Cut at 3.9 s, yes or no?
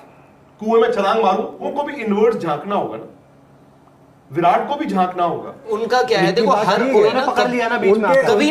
no